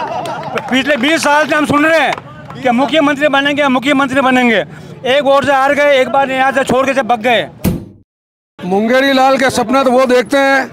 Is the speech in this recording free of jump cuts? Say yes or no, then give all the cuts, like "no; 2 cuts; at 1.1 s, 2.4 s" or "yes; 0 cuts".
no; 1 cut; at 8.0 s